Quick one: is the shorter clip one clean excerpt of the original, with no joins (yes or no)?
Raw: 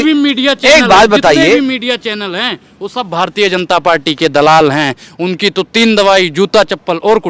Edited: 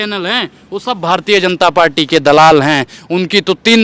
yes